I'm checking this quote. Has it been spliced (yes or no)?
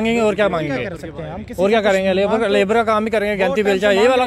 no